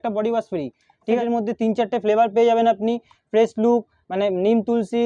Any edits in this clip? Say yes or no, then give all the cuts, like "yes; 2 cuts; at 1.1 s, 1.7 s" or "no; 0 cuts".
yes; 1 cut; at 1.2 s